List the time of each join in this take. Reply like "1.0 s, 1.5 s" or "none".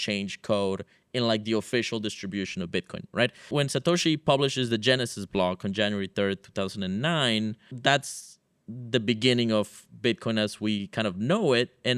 3.5 s, 7.7 s